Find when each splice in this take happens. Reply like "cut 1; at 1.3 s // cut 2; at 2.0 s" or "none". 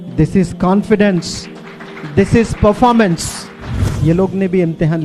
cut 1; at 3.9 s